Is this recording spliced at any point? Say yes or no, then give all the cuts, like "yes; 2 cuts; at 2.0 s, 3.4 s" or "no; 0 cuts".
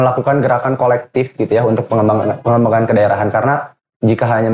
no; 0 cuts